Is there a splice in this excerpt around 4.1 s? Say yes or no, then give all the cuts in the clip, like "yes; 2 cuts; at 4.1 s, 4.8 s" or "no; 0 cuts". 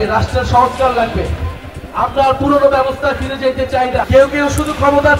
yes; 1 cut; at 4.1 s